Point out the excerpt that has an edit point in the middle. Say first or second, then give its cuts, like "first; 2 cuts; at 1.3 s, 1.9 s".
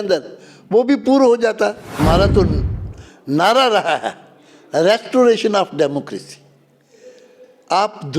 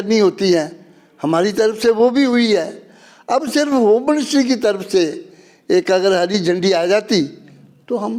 first; 1 cut; at 1.9 s